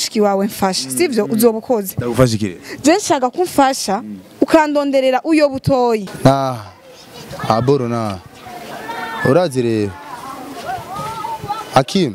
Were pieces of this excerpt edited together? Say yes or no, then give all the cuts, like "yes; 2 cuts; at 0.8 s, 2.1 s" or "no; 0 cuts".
yes; 1 cut; at 6.1 s